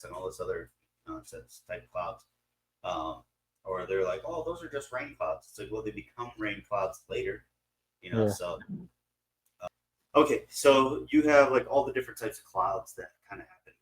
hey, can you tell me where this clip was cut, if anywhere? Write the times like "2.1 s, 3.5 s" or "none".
9.7 s

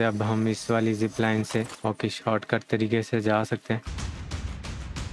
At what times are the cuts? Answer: 1.7 s, 3.9 s

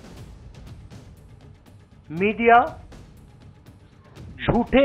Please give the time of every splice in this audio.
none

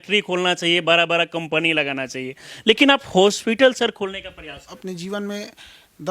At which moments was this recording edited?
4.7 s

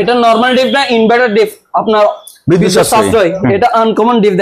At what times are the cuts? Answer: none

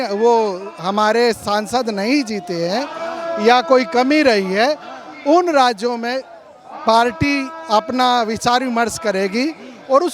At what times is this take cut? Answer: none

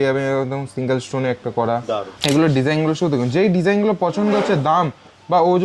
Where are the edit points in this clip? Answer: 2.1 s

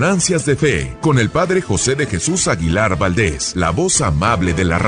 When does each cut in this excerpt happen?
0.9 s, 3.4 s

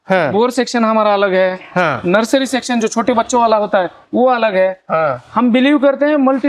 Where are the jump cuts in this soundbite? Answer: none

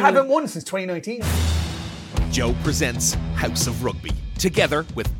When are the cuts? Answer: 1.2 s

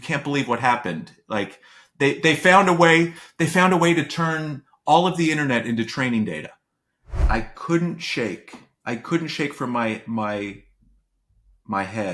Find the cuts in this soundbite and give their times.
7.2 s

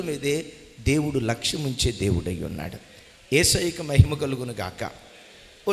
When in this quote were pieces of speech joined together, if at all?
none

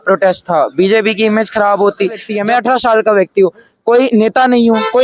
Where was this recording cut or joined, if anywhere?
2.3 s

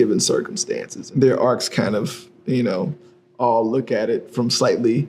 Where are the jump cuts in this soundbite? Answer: 0.9 s

